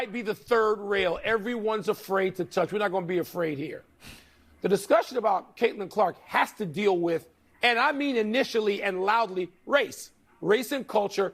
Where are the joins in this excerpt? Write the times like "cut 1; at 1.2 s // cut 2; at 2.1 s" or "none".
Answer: none